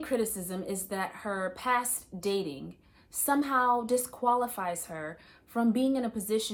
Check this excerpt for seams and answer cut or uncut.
uncut